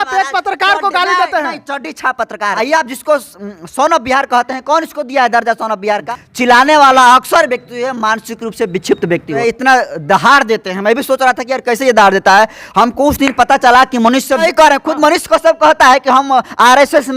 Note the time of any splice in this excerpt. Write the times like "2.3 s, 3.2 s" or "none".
2.5 s, 6.1 s, 9.4 s, 14.4 s